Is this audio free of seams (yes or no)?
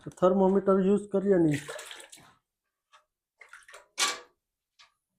yes